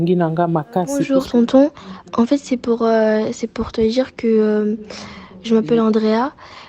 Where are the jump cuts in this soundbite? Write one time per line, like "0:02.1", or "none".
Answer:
0:01.0

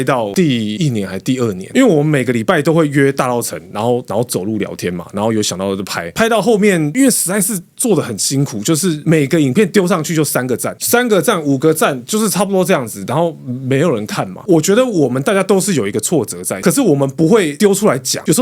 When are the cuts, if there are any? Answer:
0:06.0
0:14.4
0:16.6

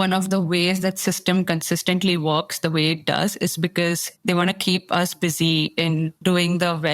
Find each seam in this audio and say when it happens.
0:05.8

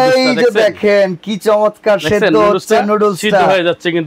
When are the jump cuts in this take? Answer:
none

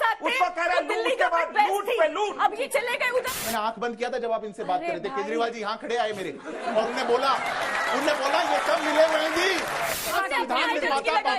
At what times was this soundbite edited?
0:03.0
0:10.1

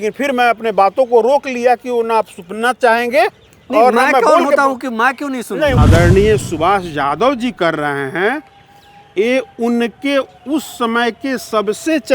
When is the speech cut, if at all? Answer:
0:05.8

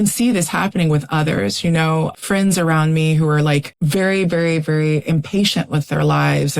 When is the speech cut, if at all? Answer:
0:03.7

